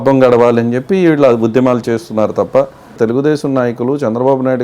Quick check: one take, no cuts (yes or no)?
no